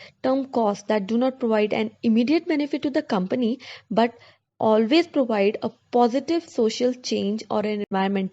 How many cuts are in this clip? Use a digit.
1